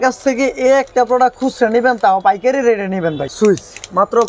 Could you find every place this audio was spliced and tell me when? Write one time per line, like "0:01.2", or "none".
0:03.2